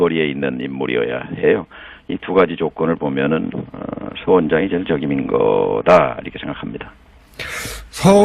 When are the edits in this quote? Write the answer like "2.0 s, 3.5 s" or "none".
1.2 s